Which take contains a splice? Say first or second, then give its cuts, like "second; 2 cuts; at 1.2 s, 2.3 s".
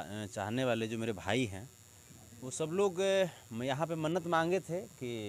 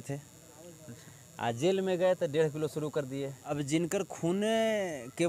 second; 1 cut; at 3.4 s